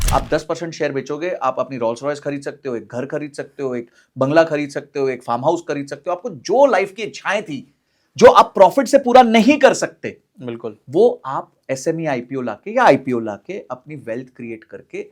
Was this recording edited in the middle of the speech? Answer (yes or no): no